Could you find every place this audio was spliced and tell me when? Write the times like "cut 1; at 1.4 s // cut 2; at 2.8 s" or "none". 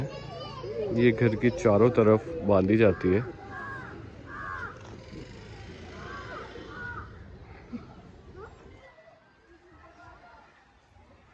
none